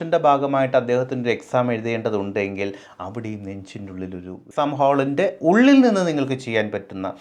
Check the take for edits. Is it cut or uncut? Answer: cut